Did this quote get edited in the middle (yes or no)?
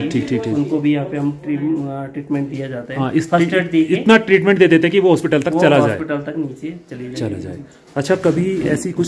no